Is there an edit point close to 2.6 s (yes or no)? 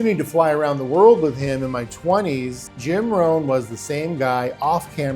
yes